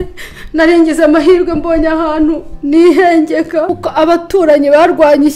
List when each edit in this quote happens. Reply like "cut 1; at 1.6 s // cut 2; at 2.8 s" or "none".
cut 1; at 3.7 s